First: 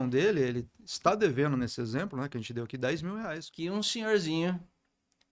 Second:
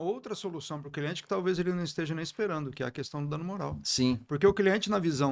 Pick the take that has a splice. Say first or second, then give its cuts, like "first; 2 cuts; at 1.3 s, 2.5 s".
first; 1 cut; at 3.4 s